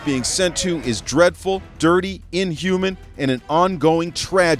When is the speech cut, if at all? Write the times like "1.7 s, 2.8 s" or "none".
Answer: none

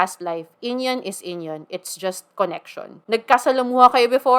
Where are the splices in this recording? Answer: 3.0 s

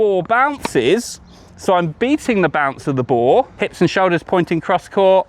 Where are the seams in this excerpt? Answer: 3.5 s

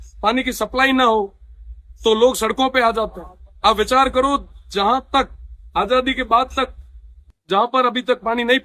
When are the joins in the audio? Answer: none

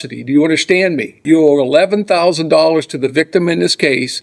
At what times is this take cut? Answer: 1.1 s

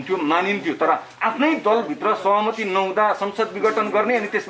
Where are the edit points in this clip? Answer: none

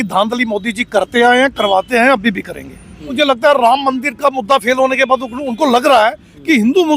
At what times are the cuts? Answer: 3.1 s

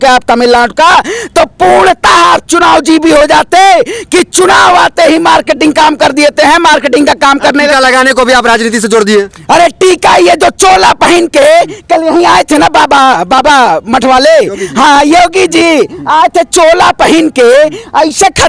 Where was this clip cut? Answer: none

